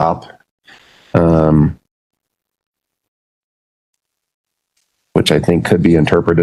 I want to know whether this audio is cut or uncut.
uncut